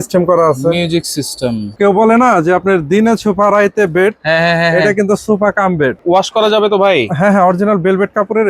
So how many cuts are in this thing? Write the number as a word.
two